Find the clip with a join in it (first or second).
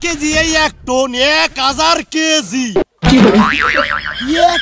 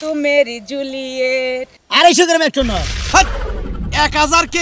second